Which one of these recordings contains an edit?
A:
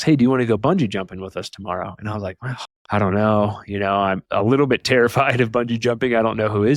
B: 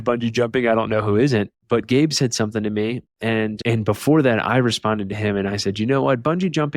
A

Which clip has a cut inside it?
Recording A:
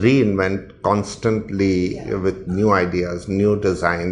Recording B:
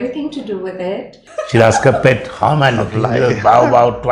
B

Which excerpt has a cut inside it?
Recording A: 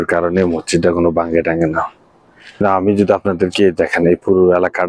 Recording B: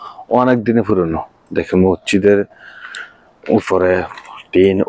A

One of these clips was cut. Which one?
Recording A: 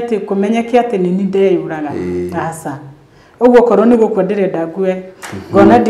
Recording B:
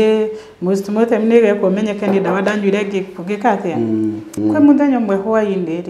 B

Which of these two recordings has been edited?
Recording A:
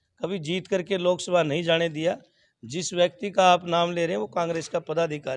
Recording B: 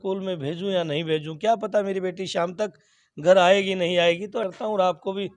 B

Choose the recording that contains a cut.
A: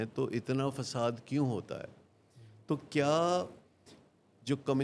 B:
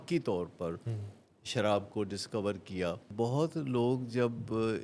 B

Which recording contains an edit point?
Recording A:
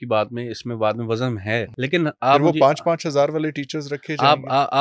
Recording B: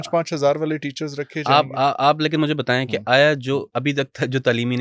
A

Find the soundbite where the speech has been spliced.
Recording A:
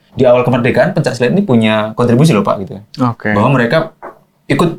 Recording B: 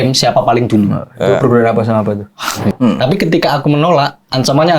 B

